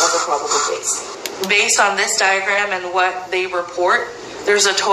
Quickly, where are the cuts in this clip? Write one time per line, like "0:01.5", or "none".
0:01.0